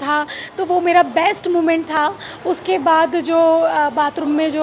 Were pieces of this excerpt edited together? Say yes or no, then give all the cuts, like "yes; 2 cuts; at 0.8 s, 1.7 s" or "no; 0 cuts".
no; 0 cuts